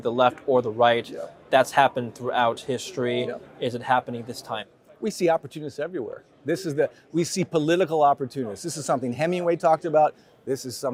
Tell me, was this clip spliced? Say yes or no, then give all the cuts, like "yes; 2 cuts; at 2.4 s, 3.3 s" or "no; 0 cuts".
no; 0 cuts